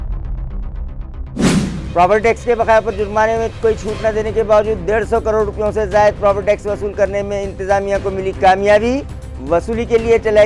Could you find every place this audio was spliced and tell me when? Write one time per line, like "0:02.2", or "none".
none